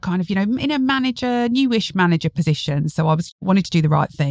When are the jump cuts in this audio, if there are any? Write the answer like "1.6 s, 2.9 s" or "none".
3.3 s